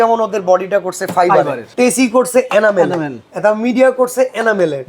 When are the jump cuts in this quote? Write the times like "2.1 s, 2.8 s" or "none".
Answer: 1.6 s